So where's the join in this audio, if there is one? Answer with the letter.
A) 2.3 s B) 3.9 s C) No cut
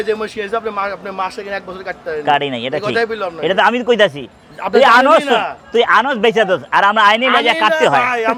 C